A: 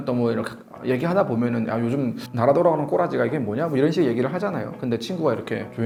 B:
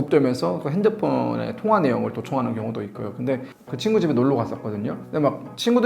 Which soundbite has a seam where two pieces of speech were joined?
B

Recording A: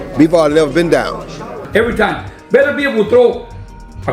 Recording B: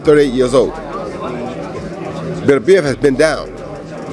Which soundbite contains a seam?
A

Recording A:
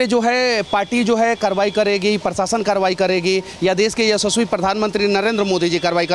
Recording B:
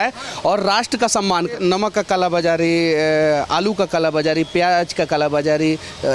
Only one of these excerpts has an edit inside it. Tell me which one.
B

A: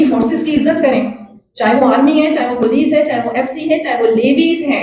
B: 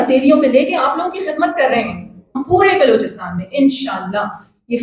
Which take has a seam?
B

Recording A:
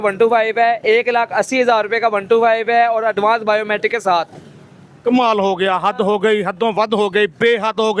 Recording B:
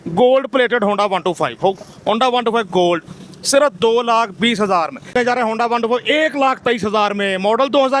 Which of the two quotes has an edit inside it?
B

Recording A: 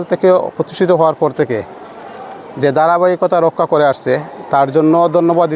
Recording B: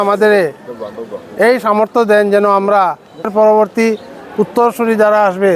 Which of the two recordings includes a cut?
B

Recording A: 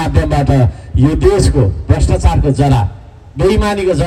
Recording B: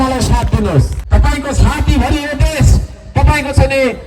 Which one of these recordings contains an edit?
B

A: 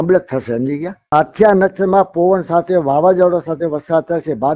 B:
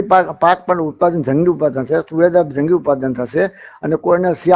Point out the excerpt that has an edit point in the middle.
A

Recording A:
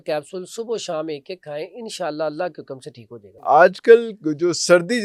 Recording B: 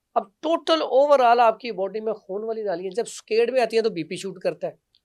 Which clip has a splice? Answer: A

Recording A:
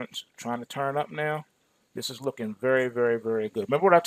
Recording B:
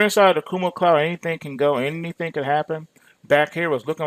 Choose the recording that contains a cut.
A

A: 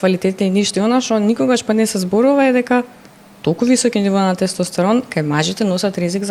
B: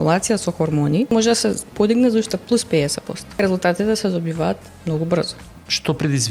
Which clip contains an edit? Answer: B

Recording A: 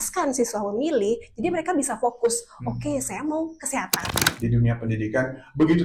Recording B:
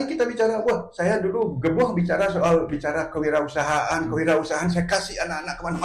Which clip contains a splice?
A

